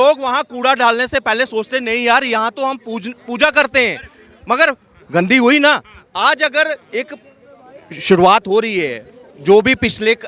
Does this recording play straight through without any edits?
yes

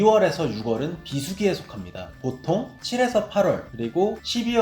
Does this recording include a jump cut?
yes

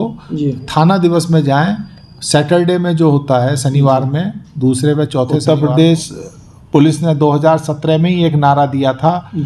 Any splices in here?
yes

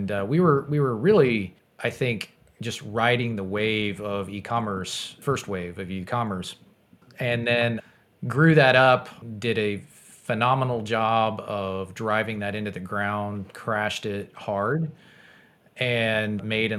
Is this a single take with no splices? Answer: no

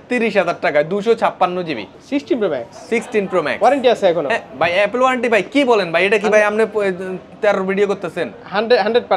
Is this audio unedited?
yes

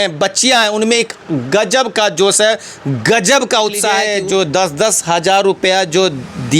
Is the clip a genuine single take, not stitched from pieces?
no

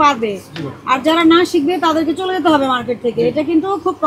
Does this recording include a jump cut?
no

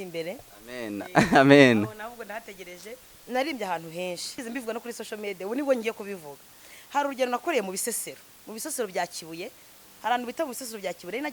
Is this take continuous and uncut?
no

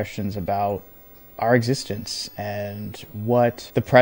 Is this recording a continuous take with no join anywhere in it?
yes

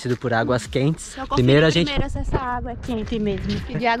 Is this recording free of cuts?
yes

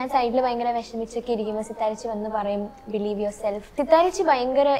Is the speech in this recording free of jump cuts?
no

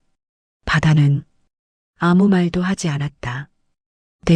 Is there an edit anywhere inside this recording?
no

